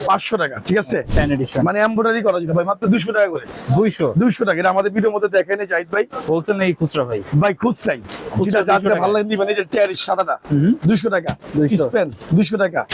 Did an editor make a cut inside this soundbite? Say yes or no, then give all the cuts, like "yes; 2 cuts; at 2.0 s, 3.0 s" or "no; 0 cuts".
yes; 1 cut; at 1.1 s